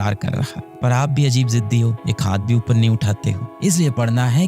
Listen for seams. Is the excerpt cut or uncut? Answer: cut